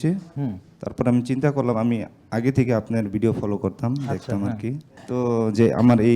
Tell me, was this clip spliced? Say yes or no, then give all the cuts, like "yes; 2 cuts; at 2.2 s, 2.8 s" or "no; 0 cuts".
yes; 1 cut; at 4.9 s